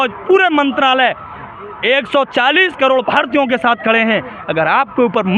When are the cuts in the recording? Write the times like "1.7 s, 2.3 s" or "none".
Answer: none